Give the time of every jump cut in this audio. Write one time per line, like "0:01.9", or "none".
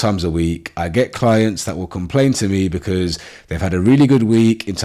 none